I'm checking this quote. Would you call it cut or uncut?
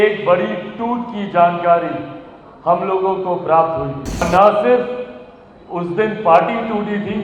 cut